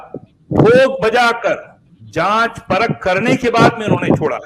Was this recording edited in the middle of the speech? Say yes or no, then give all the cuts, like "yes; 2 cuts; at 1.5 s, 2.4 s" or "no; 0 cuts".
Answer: no; 0 cuts